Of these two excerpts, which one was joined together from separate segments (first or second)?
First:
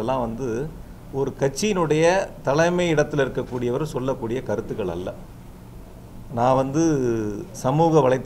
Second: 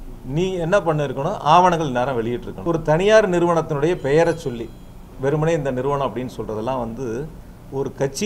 second